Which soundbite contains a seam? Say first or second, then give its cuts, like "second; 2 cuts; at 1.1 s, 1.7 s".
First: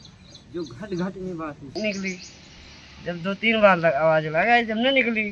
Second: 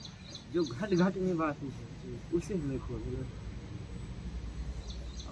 first; 1 cut; at 1.8 s